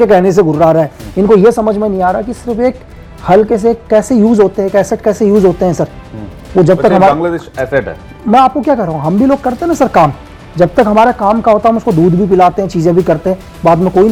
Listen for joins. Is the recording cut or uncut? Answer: uncut